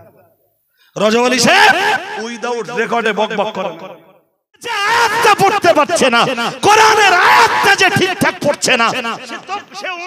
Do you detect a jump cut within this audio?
yes; 1 cut; at 4.8 s

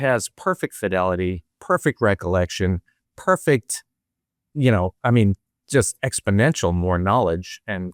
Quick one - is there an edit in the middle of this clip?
no; 0 cuts

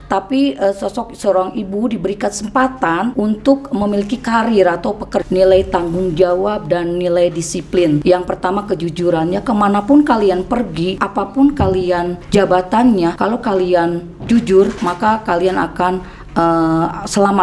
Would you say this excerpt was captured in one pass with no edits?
no; 7 cuts; at 3.1 s, 5.1 s, 8.0 s, 11.0 s, 12.2 s, 13.2 s, 14.8 s

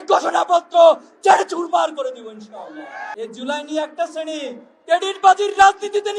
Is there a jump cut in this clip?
yes; 1 cut; at 3.1 s

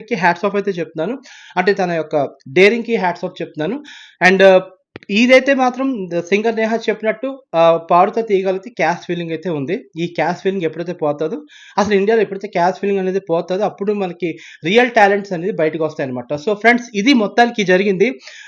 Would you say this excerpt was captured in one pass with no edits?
yes; 0 cuts

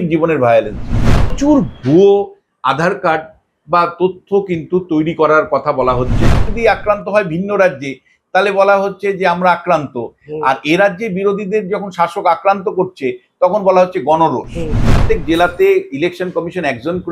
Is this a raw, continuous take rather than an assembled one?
no; 3 cuts; at 1.3 s, 6.5 s, 14.9 s

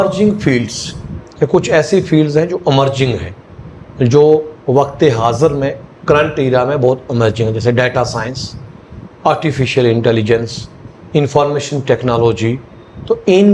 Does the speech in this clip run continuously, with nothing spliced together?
yes; 0 cuts

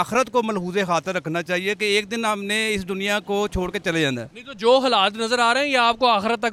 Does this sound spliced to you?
no; 0 cuts

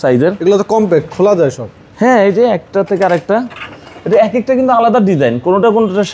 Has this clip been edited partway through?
no; 0 cuts

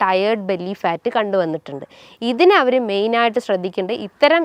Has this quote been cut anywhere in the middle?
no; 0 cuts

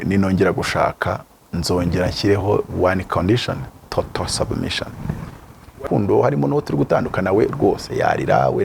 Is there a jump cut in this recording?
yes; 1 cut; at 5.8 s

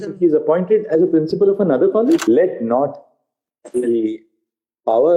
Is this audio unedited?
no; 1 cut; at 2.2 s

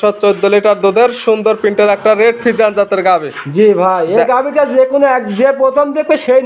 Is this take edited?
no; 0 cuts

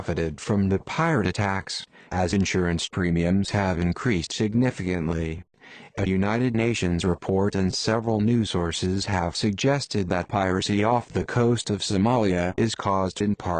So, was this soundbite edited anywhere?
no; 0 cuts

